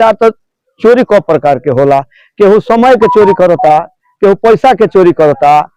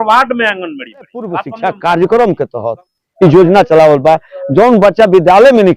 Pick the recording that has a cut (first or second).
second